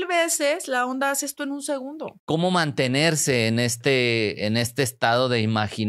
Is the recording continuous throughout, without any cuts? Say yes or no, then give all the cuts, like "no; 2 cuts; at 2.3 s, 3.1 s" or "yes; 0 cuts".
no; 1 cut; at 2.1 s